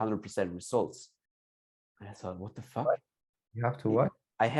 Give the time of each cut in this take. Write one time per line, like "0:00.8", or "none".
none